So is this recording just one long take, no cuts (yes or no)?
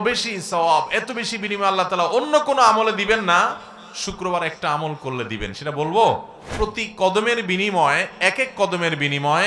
no